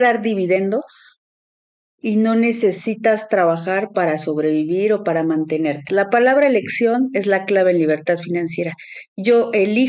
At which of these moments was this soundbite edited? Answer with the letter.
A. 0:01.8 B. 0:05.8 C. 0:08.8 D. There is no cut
B